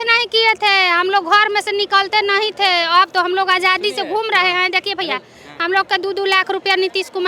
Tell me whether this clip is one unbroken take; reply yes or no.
yes